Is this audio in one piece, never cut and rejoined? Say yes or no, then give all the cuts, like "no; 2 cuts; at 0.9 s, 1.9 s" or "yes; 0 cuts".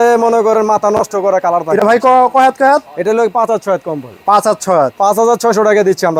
yes; 0 cuts